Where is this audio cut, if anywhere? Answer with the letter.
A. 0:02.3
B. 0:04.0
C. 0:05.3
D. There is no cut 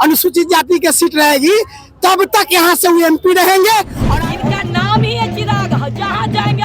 B